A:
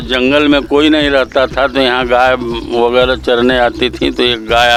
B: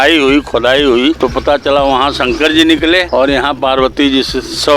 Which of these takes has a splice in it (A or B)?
B